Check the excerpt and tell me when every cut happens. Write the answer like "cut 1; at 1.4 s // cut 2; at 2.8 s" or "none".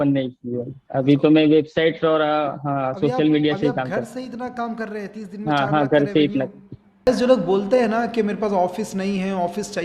cut 1; at 7.1 s